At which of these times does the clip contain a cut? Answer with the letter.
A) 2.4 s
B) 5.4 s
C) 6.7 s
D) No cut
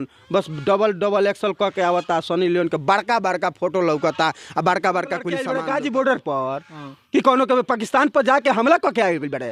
B